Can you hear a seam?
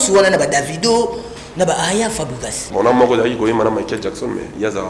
yes; 1 cut; at 2.6 s

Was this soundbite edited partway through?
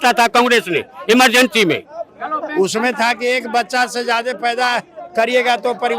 yes; 1 cut; at 1.9 s

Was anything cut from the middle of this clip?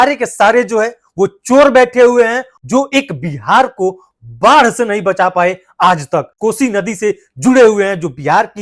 yes; 2 cuts; at 2.5 s, 6.3 s

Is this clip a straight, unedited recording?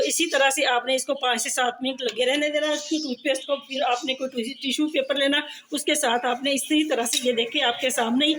yes; 0 cuts

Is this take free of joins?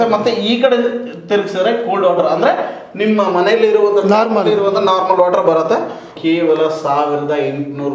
no; 1 cut; at 6.1 s

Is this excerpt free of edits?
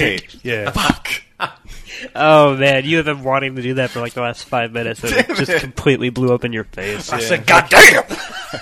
no; 1 cut; at 7.0 s

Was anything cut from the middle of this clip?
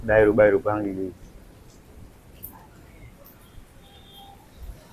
no; 0 cuts

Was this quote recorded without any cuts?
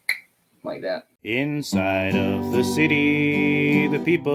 no; 1 cut; at 1.1 s

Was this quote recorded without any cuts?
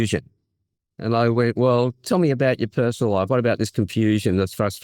yes; 0 cuts

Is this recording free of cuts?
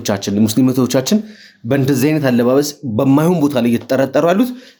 yes; 0 cuts

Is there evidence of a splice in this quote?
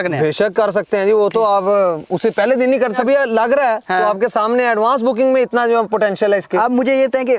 no; 0 cuts

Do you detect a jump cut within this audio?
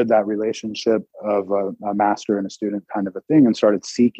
yes; 1 cut; at 1.1 s

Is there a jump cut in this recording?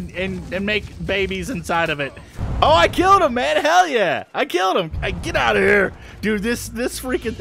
yes; 1 cut; at 2.4 s

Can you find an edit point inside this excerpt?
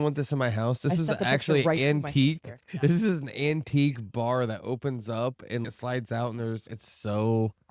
no; 0 cuts

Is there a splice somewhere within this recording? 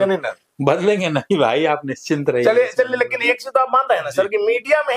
no; 0 cuts

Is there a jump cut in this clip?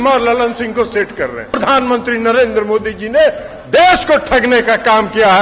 yes; 1 cut; at 1.5 s

